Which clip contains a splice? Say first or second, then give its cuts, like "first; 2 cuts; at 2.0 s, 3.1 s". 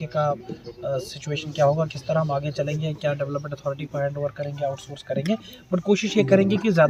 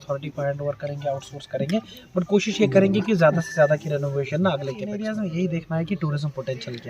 second; 1 cut; at 4.9 s